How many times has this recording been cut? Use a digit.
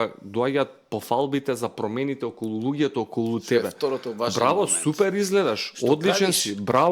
0